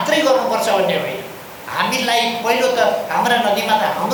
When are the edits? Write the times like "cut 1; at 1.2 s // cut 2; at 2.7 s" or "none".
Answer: none